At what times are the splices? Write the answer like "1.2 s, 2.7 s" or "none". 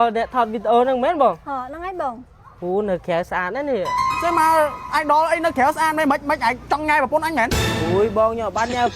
4.0 s, 7.6 s